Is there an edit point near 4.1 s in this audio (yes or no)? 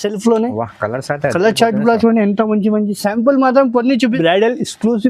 yes